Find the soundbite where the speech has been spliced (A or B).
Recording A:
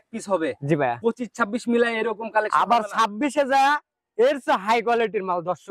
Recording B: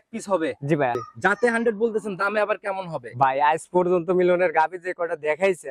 B